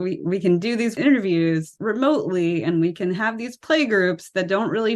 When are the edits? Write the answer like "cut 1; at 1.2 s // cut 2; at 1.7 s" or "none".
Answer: cut 1; at 1.0 s // cut 2; at 1.7 s